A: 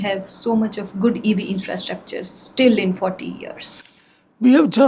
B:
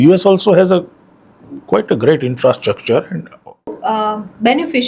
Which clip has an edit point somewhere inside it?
B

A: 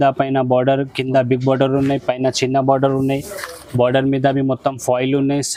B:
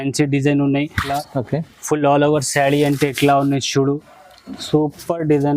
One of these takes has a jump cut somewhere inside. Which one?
B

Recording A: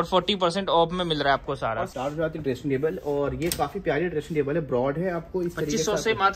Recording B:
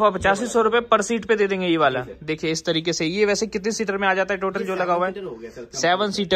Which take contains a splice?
A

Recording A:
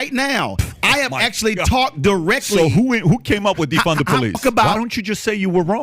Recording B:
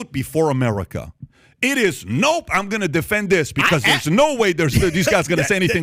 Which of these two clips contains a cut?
A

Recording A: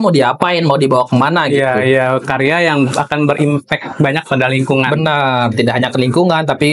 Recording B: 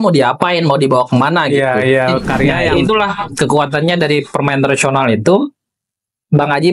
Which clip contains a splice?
B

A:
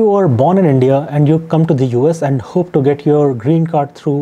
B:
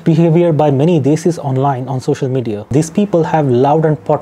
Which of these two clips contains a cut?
B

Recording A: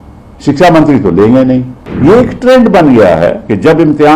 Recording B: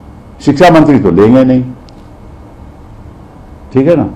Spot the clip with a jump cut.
A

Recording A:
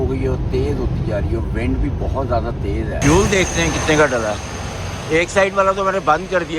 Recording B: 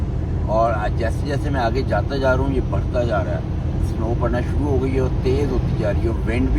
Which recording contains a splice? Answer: A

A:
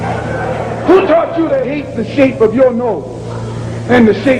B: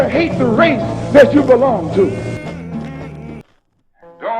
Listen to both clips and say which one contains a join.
B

